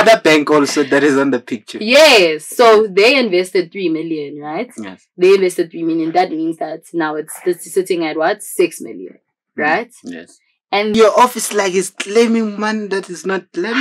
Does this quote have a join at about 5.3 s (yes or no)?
no